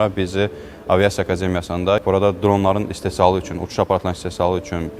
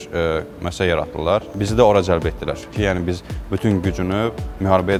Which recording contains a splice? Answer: first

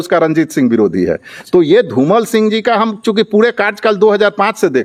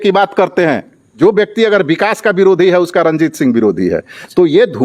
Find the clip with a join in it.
second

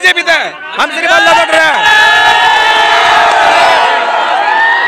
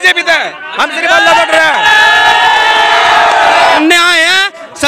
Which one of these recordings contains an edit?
second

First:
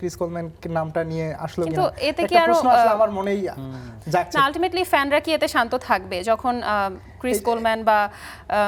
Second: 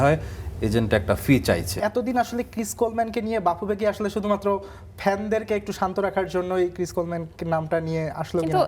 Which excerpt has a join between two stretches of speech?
second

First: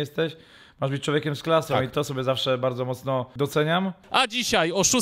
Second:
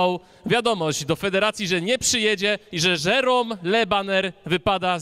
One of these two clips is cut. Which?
first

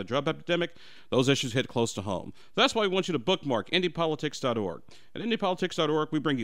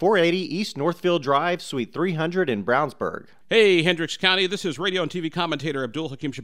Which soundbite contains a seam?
second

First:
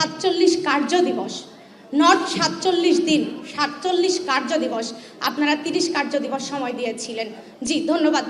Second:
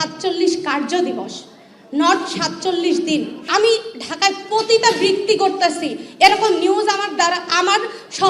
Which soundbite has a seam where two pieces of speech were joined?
second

